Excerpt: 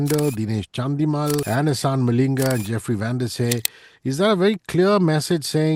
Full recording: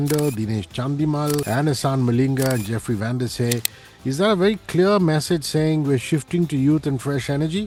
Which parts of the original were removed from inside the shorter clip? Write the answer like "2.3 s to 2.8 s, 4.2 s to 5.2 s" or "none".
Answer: none

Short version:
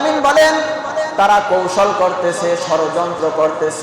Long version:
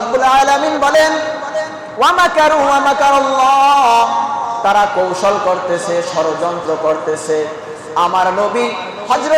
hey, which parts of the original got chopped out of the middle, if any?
1.7 s to 4.6 s

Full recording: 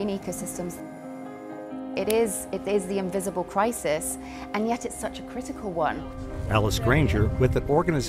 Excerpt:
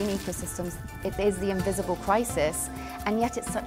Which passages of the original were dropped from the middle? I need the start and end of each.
0.9 s to 2.4 s

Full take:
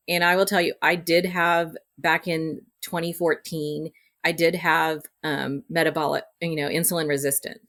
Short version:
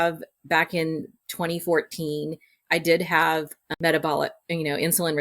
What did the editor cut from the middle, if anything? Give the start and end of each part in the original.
5.2 s to 5.6 s

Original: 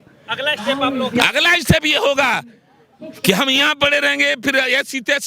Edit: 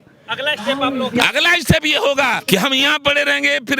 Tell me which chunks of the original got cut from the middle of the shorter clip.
2.4 s to 3.2 s

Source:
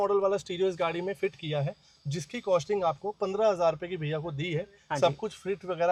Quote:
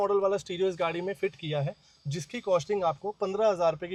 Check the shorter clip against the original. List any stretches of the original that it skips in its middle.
none

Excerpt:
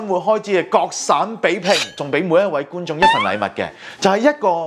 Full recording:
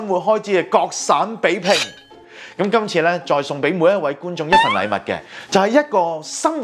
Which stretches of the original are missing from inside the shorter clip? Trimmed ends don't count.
2.0 s to 3.5 s

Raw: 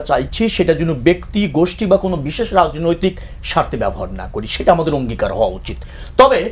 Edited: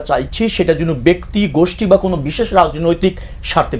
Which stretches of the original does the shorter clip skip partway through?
none

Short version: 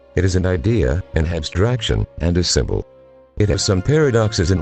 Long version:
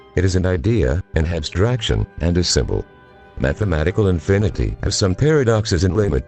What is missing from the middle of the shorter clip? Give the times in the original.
3.3 s to 4.6 s

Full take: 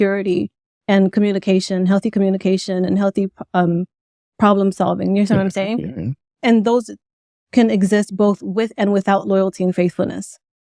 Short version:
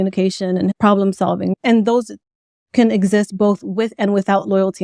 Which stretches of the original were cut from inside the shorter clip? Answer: 3.0 s to 4.3 s, 5.1 s to 6.3 s

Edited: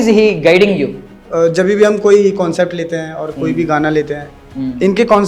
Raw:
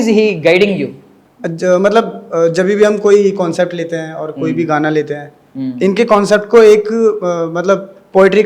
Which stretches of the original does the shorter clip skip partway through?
1.2 s to 2.2 s

